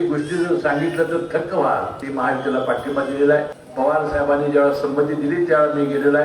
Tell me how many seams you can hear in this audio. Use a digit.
2